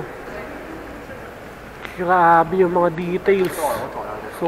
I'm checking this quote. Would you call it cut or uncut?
uncut